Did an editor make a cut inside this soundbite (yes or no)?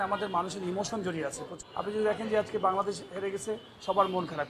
yes